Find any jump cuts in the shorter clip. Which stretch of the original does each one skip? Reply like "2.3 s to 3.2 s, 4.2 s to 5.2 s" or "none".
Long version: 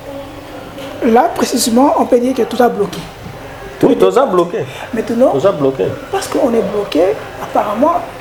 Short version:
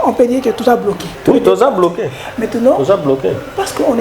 3.0 s to 3.6 s